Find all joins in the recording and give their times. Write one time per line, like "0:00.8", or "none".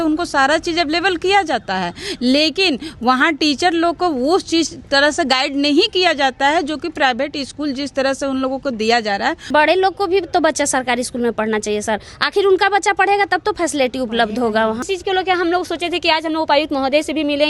0:09.5
0:14.8